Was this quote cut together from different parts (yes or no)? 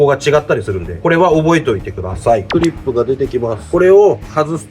yes